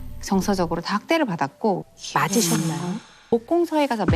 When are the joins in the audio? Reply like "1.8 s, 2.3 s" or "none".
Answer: 1.8 s, 3.3 s